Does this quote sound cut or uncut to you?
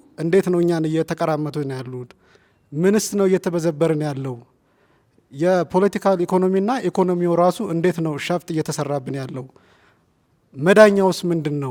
uncut